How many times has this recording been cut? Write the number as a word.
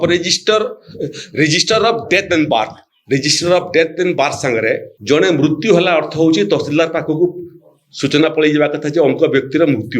one